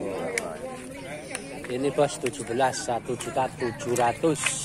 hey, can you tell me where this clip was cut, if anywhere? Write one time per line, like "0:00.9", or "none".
none